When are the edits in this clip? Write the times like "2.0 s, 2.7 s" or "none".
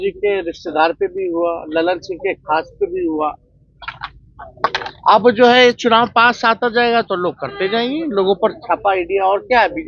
none